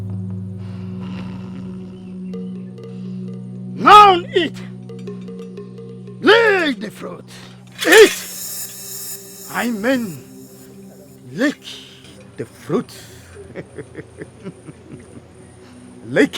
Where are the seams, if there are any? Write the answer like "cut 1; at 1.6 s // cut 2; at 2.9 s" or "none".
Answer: cut 1; at 3.7 s